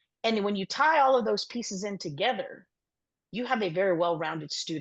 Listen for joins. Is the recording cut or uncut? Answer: uncut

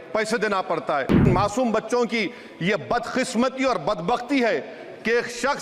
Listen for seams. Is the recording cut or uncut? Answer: cut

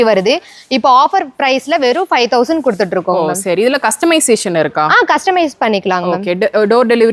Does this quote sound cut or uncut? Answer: uncut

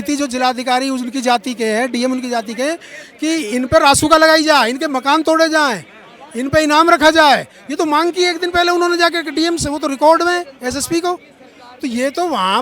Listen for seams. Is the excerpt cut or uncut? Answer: uncut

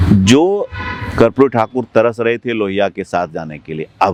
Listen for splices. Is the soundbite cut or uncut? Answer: uncut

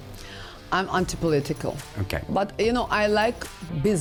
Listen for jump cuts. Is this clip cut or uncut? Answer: uncut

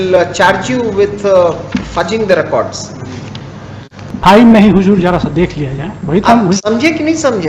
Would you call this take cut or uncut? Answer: cut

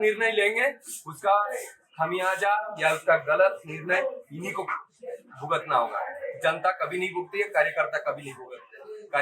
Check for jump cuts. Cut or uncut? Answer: uncut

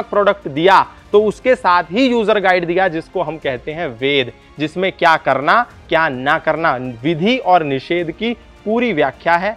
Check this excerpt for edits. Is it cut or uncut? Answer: uncut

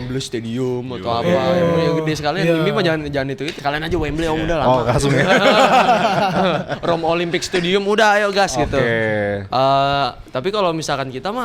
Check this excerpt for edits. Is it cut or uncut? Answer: cut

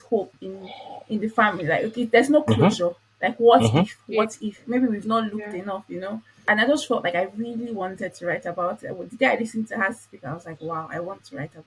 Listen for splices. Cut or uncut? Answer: uncut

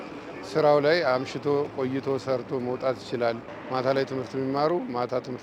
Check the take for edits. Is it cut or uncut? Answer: cut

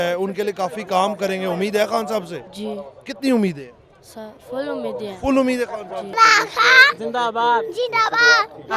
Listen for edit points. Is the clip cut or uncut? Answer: cut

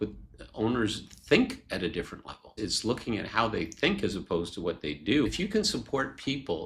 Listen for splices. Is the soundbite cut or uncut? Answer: cut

